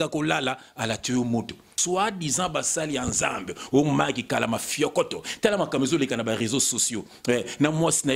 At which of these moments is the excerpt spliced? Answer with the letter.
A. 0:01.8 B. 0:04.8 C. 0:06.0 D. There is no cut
A